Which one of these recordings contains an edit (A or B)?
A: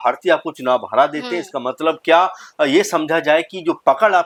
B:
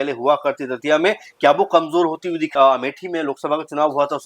B